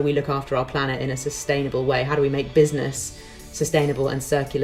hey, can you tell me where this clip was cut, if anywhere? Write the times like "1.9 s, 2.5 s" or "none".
none